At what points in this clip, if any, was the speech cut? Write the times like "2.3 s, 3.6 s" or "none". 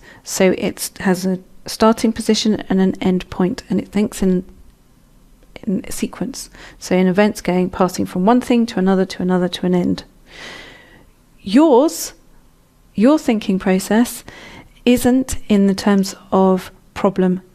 none